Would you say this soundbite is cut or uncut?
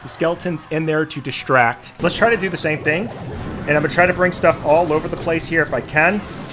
cut